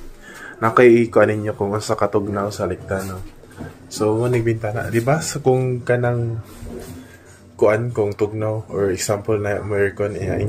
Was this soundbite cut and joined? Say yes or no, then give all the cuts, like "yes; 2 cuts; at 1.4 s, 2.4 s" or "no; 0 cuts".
no; 0 cuts